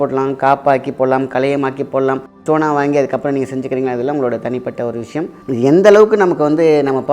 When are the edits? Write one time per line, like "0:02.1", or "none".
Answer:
0:02.3
0:05.4

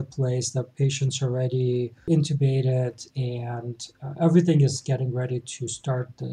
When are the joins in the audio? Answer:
0:02.0

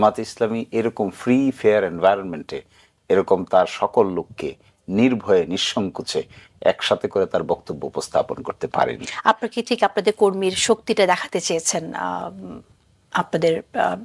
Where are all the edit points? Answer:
none

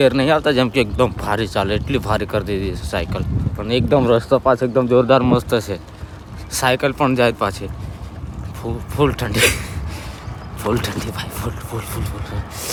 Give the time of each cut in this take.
none

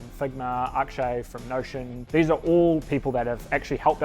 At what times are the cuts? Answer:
0:01.9

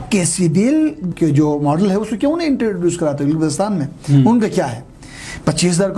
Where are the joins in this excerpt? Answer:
0:01.1

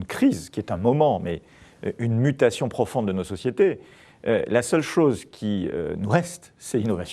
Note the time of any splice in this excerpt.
0:06.2

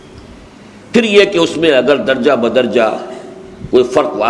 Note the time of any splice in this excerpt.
none

